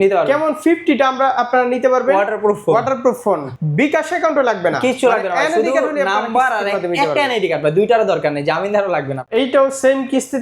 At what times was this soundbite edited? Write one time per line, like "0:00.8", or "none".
0:03.6
0:09.2